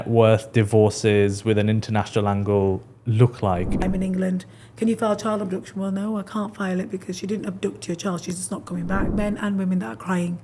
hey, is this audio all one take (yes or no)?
no